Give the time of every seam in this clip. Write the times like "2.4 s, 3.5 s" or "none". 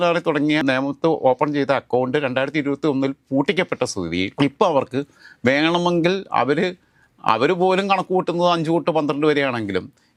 none